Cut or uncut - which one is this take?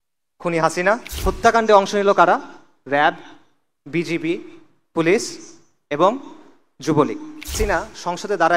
cut